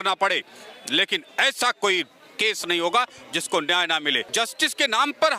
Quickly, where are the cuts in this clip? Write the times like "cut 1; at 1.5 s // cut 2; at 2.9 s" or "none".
cut 1; at 4.2 s